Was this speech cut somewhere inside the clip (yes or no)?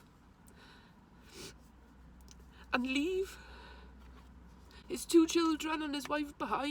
no